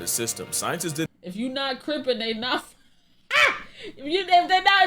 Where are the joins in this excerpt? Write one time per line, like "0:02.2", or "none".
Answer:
0:01.1